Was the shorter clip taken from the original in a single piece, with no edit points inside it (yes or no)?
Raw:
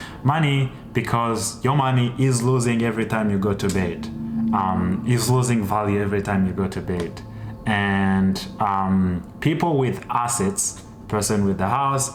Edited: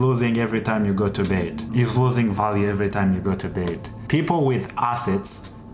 no